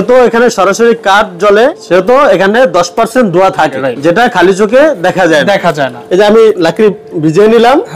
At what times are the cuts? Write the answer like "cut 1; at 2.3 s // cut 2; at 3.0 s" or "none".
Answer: cut 1; at 1.8 s // cut 2; at 3.8 s // cut 3; at 5.9 s